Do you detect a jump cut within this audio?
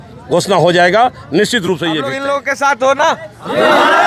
yes; 1 cut; at 2.3 s

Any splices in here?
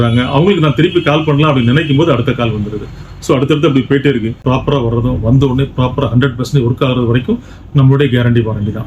yes; 1 cut; at 4.3 s

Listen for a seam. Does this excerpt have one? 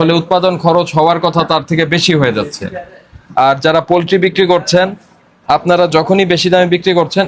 no; 0 cuts

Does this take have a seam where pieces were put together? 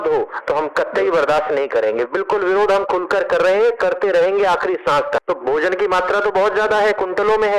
yes; 1 cut; at 5.2 s

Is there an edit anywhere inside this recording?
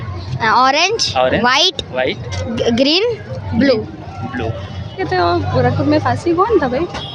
yes; 1 cut; at 5.0 s

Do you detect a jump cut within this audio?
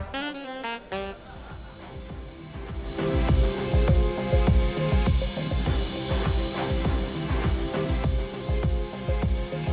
yes; 1 cut; at 1.3 s

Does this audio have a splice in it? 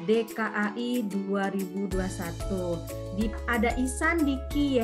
no; 0 cuts

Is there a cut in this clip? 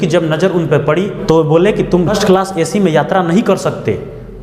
no; 0 cuts

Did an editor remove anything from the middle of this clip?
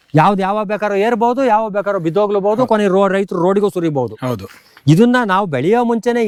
no; 0 cuts

